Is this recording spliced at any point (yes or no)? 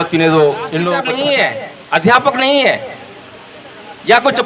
yes